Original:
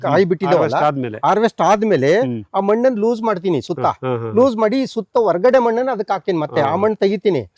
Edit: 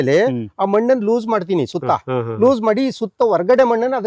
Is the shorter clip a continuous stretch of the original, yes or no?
yes